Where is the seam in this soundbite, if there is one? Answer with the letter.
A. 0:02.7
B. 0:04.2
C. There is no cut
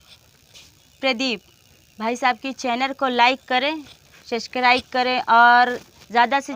C